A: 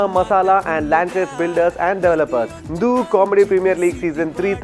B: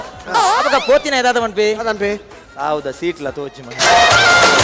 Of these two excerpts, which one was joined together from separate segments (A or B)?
A